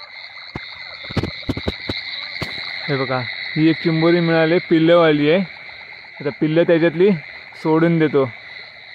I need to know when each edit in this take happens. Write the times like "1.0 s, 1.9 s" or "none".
2.7 s

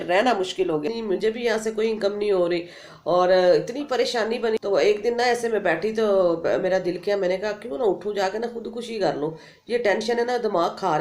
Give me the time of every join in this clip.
1.0 s, 4.6 s

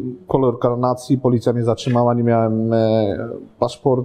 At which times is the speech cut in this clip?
none

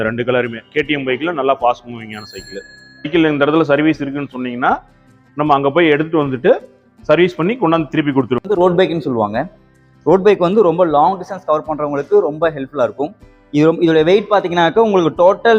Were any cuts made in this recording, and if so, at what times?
3.1 s, 8.4 s

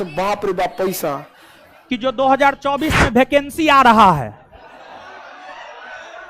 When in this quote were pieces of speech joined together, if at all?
1.8 s

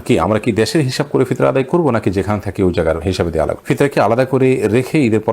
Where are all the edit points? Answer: 3.6 s

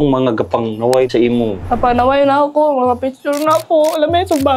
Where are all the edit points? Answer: 1.1 s

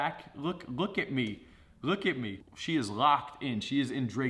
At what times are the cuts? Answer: 2.4 s

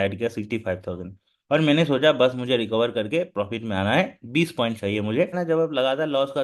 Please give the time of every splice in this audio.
5.4 s

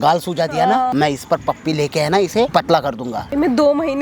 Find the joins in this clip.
0.9 s, 3.0 s

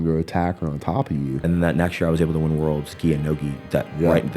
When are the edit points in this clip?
1.4 s

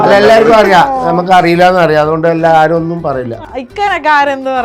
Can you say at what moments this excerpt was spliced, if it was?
3.4 s

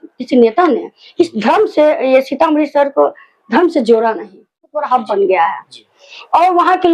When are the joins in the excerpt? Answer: 4.9 s

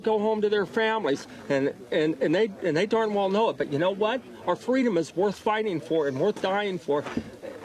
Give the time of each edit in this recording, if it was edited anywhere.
none

